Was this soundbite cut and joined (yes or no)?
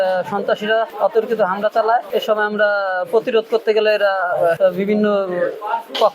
yes